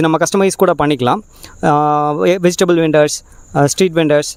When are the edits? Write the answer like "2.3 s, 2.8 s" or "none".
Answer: none